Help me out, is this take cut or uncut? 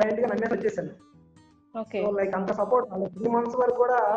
uncut